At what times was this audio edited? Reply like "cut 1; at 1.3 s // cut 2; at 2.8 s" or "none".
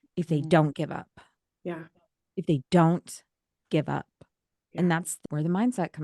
cut 1; at 5.1 s